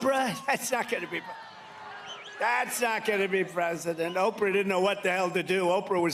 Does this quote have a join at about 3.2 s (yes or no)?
no